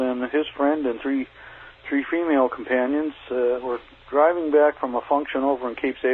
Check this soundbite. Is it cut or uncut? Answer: uncut